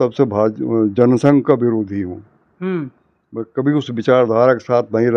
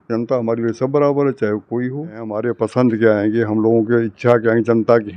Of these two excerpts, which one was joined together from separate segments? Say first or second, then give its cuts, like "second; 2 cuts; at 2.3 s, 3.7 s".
second; 1 cut; at 2.4 s